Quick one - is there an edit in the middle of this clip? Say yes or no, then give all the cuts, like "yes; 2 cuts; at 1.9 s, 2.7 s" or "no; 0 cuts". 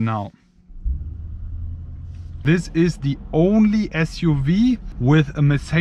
yes; 2 cuts; at 2.4 s, 4.9 s